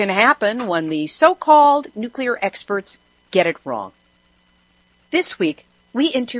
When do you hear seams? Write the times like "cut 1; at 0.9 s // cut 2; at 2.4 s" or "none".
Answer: none